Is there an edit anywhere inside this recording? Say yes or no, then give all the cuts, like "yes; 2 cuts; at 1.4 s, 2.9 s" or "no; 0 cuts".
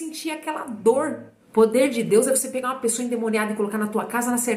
yes; 1 cut; at 1.3 s